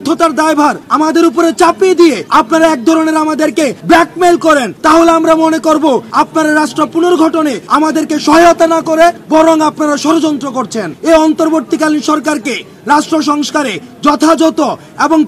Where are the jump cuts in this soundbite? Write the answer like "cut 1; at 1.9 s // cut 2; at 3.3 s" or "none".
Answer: cut 1; at 0.8 s // cut 2; at 2.2 s // cut 3; at 3.8 s // cut 4; at 4.7 s // cut 5; at 6.1 s // cut 6; at 7.6 s // cut 7; at 9.2 s // cut 8; at 10.9 s